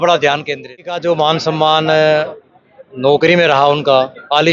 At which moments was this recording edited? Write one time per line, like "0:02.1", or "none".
0:01.0

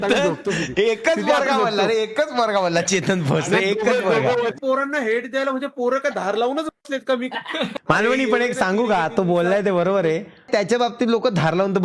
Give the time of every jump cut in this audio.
0:04.6
0:07.7

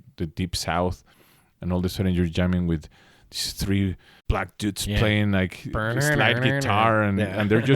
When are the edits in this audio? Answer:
0:04.1

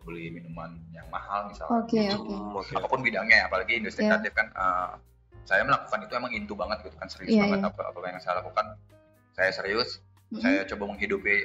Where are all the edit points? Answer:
0:02.5

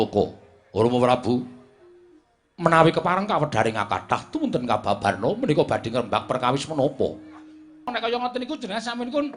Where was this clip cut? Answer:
0:07.9

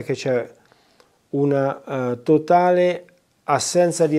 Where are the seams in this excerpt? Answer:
none

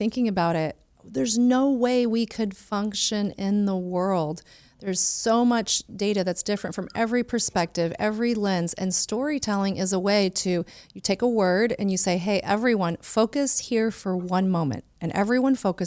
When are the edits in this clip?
none

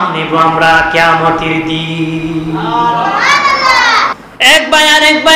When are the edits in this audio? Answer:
0:04.2

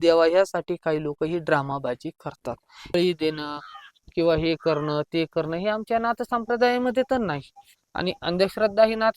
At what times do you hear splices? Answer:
0:02.9

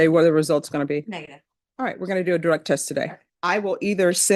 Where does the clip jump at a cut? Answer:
0:03.3

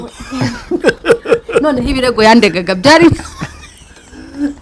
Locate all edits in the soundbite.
none

